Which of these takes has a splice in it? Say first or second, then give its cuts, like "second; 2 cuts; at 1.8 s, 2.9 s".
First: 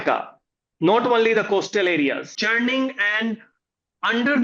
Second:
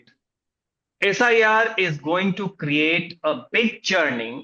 first; 1 cut; at 2.4 s